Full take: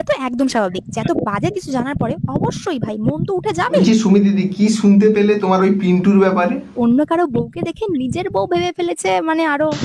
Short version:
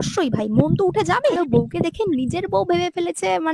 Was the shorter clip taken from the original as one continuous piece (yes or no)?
no